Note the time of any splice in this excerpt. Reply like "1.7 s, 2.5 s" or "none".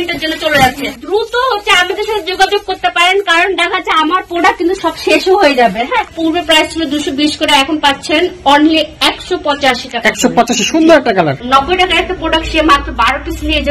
1.0 s, 6.1 s, 11.4 s